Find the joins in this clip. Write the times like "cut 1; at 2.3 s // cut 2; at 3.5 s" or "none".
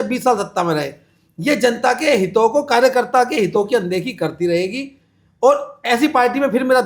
none

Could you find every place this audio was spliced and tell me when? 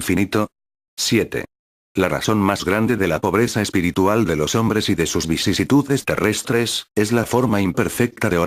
cut 1; at 4.2 s

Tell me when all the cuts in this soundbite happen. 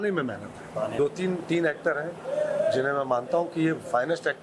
cut 1; at 0.9 s

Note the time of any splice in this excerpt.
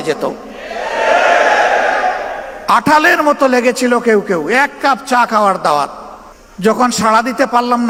none

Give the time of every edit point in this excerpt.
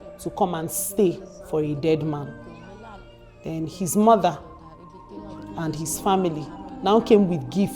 cut 1; at 2.8 s

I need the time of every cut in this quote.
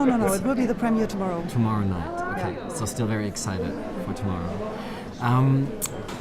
cut 1; at 5.1 s

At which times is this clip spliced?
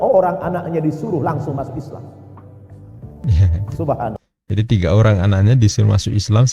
none

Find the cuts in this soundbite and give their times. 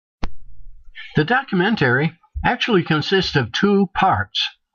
none

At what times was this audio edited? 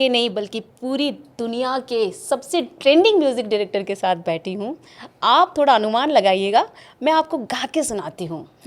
none

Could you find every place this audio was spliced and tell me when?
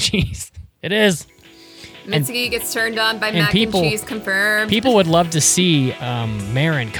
none

